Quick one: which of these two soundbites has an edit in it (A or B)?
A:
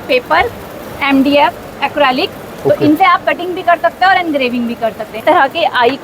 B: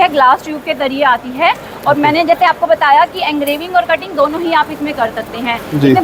A